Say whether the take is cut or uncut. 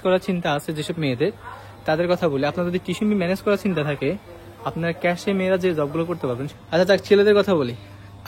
cut